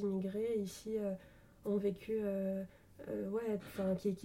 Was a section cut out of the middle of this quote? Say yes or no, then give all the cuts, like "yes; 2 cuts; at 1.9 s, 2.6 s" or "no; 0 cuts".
no; 0 cuts